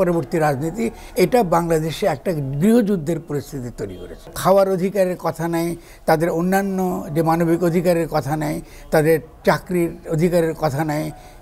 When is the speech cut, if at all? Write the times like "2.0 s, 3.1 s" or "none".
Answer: 4.3 s